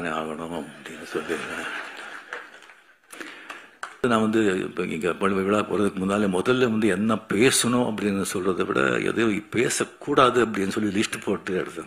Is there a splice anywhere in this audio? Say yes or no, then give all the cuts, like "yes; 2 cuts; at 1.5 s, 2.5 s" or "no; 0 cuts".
yes; 1 cut; at 4.0 s